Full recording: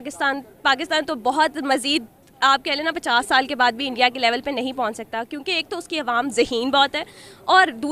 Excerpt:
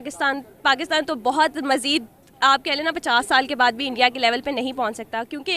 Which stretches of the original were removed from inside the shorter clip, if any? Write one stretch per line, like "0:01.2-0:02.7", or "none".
none